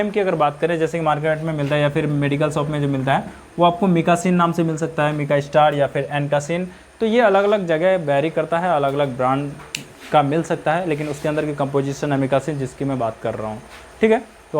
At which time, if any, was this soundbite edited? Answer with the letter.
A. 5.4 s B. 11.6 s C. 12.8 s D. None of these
D